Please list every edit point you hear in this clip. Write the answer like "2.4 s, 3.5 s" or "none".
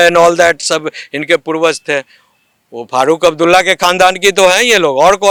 none